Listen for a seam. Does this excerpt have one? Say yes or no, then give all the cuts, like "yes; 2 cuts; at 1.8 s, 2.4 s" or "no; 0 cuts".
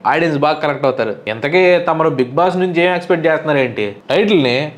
yes; 1 cut; at 1.3 s